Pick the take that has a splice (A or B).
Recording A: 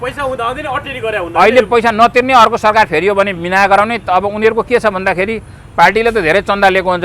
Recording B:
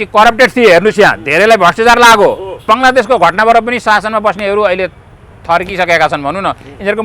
B